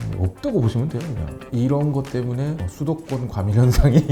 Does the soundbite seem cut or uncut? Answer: uncut